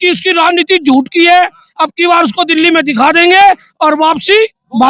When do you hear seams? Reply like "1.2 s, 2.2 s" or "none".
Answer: none